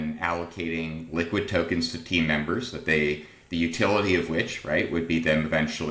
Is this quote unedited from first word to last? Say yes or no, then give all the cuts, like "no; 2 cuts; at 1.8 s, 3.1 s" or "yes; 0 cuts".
yes; 0 cuts